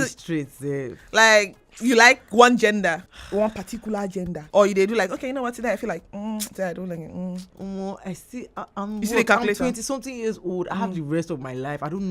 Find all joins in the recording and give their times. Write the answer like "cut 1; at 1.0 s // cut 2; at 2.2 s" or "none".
cut 1; at 3.1 s // cut 2; at 4.4 s // cut 3; at 7.5 s